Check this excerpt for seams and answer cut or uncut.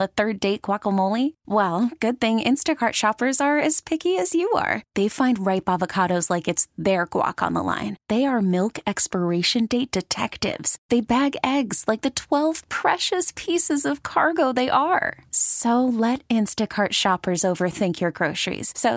uncut